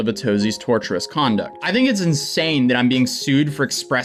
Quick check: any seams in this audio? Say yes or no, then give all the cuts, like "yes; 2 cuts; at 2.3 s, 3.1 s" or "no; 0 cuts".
no; 0 cuts